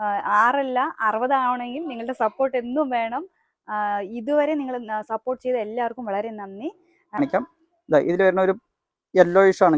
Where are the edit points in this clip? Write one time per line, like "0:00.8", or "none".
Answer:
0:07.2